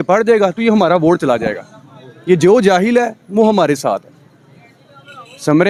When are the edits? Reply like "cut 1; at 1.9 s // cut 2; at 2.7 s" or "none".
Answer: none